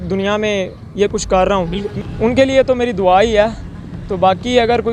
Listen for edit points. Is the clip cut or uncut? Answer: cut